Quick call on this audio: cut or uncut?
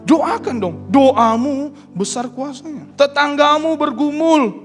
cut